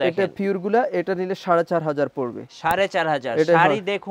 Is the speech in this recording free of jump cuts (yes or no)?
yes